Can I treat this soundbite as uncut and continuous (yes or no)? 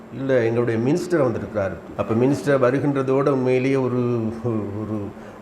no